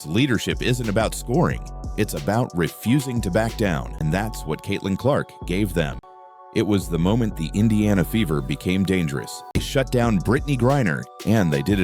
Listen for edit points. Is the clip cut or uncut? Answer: cut